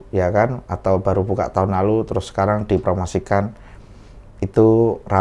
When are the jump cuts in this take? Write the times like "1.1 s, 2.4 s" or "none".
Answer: none